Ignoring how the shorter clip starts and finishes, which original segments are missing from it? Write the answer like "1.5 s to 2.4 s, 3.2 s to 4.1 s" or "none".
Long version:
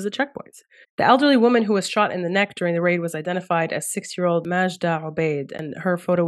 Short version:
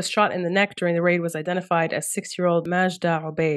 none